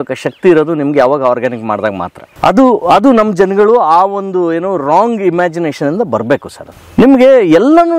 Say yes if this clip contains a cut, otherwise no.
no